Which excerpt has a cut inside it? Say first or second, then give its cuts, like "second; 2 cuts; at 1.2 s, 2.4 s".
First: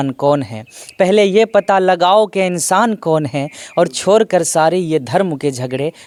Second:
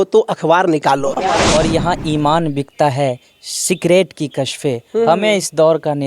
second; 1 cut; at 1.4 s